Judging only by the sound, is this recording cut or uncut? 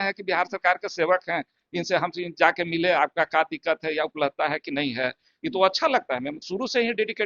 uncut